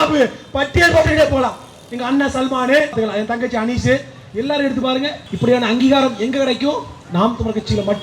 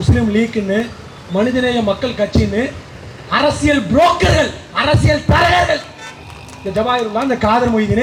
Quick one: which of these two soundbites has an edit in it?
first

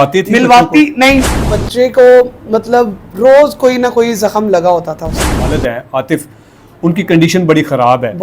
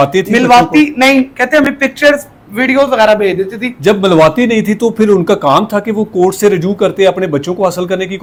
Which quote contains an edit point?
first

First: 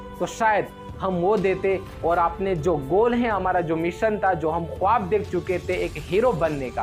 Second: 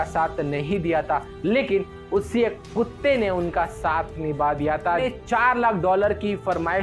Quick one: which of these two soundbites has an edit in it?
second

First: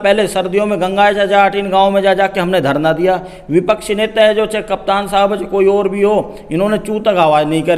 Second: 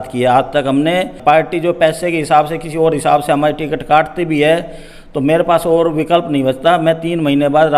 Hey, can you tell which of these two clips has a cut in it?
second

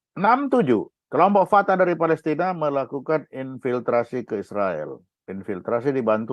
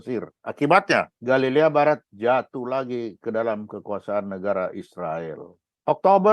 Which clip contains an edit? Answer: first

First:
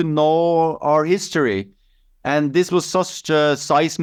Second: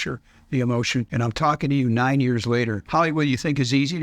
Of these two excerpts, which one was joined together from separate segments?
second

